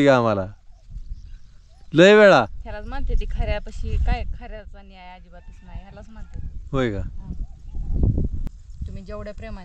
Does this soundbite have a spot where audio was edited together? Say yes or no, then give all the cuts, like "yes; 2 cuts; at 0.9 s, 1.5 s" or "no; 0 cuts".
yes; 1 cut; at 8.4 s